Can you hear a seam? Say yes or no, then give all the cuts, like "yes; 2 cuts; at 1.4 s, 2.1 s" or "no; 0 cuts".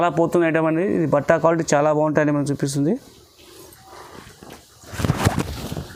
no; 0 cuts